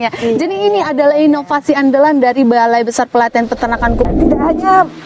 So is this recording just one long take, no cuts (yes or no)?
no